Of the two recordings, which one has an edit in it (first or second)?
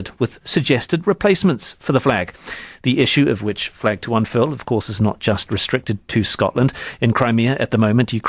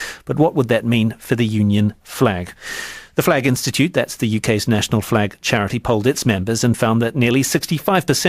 first